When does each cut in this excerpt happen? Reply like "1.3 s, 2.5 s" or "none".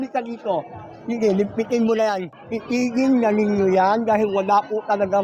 2.3 s